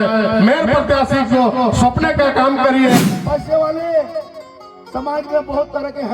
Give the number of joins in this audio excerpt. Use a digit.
1